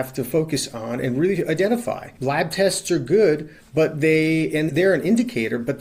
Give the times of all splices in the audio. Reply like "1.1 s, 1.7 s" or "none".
2.0 s